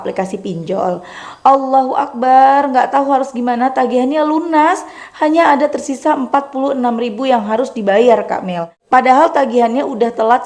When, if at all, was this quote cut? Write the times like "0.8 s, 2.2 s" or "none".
8.7 s